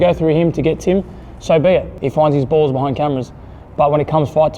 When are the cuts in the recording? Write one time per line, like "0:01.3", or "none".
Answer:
0:01.9